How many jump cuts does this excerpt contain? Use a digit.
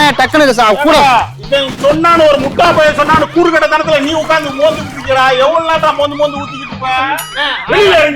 0